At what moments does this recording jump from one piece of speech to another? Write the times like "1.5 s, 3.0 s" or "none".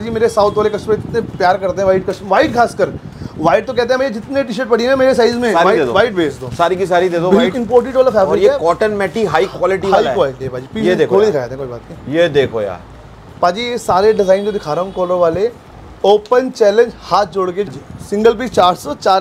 7.5 s, 17.6 s